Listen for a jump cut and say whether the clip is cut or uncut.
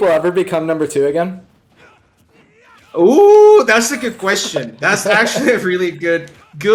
uncut